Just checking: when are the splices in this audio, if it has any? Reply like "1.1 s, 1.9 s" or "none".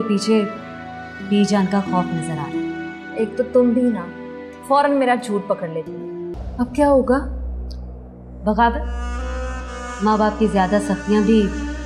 6.3 s